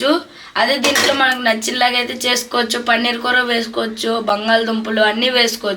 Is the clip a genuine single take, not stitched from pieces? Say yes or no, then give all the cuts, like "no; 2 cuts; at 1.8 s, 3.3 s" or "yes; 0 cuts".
yes; 0 cuts